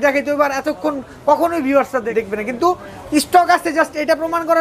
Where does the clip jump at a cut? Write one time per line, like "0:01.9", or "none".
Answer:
0:02.1